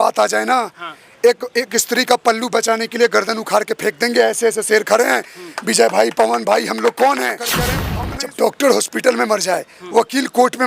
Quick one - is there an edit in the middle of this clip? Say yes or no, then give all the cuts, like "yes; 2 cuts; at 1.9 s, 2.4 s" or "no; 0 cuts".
yes; 1 cut; at 7.8 s